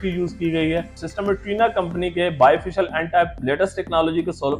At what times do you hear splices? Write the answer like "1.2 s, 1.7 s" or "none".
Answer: 1.0 s